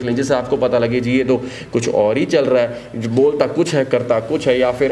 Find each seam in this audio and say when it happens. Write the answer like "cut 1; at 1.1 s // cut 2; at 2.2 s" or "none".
none